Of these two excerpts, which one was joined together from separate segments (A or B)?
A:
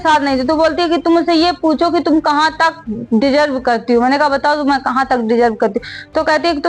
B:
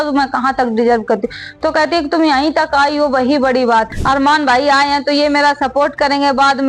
B